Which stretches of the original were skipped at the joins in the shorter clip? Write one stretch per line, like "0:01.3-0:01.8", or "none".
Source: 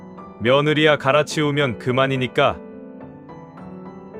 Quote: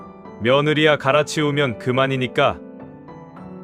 0:02.5-0:02.8

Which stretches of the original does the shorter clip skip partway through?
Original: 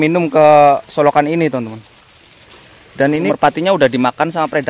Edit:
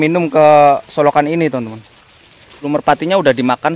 0:02.7-0:03.2

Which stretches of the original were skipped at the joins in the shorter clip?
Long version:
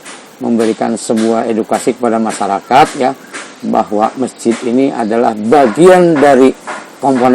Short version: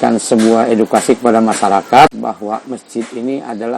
0:02.9-0:03.6

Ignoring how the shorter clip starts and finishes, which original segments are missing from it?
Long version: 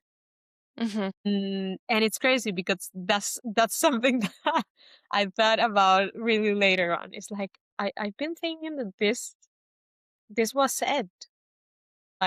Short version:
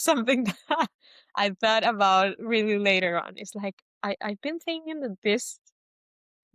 none

